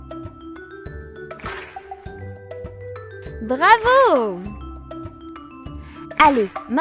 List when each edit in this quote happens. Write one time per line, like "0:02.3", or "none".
0:01.7
0:03.4